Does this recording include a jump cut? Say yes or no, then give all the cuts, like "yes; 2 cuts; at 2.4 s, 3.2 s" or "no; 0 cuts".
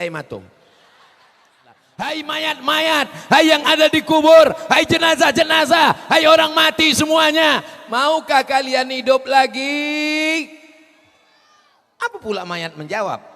yes; 1 cut; at 1.9 s